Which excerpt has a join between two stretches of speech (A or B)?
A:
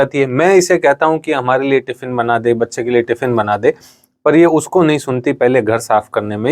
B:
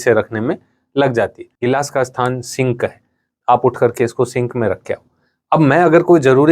B